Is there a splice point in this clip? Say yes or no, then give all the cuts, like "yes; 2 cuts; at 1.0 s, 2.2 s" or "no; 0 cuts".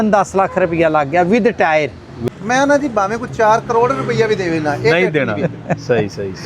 yes; 1 cut; at 2.1 s